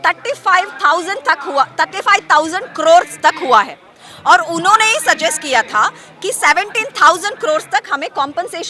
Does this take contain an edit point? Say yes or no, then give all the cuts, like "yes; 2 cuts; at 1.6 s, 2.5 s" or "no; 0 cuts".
no; 0 cuts